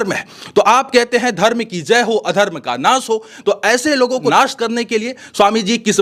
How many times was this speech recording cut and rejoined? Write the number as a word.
one